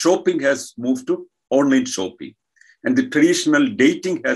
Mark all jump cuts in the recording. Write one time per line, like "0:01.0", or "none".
none